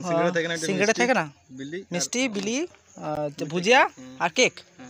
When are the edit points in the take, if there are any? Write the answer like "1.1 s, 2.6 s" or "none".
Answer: none